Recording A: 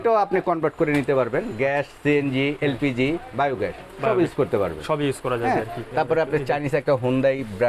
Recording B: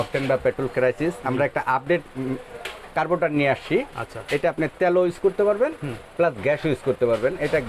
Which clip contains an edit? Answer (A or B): A